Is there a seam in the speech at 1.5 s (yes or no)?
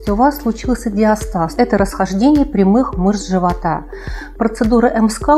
yes